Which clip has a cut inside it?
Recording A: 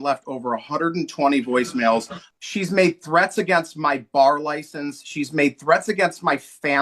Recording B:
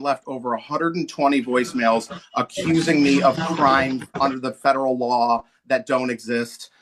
A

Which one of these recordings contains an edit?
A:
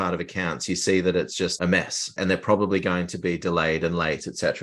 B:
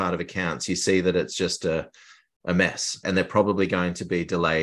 A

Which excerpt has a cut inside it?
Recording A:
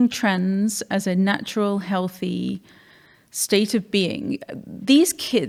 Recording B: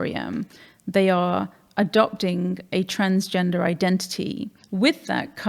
B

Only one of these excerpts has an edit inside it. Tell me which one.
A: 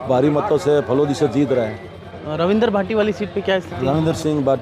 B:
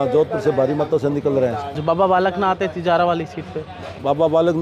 B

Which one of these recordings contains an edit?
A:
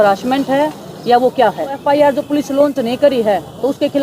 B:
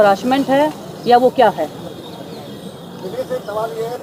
A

